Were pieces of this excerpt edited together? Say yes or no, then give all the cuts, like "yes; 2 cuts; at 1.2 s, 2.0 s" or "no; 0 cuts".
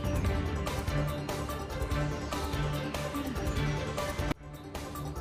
no; 0 cuts